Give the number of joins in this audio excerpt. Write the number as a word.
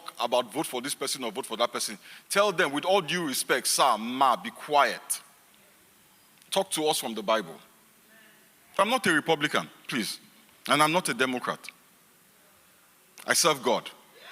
one